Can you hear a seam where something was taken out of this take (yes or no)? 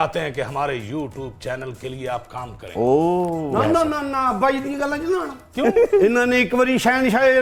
no